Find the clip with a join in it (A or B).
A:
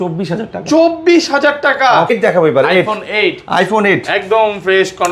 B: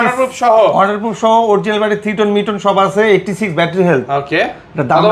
A